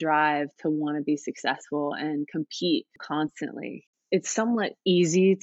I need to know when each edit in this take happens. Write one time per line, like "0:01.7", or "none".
0:03.9

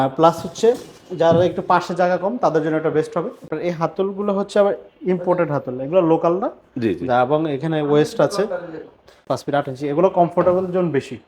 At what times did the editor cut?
0:03.5
0:09.2

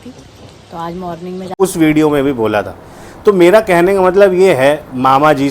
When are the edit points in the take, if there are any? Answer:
0:01.5

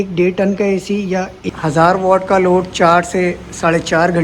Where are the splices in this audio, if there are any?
0:01.3

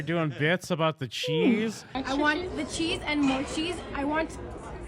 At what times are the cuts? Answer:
0:01.9

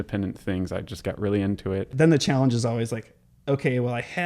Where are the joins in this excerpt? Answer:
0:01.9

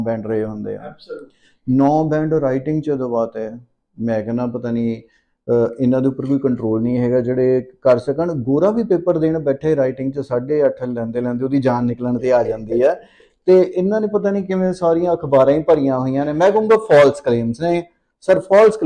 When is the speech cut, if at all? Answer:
none

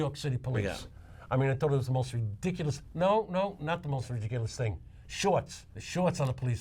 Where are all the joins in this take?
0:02.8
0:05.7

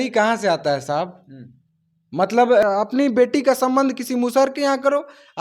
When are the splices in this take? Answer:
0:02.6

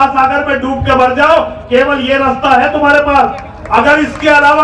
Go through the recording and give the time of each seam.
none

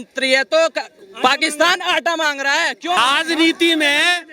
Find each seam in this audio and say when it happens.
0:03.0

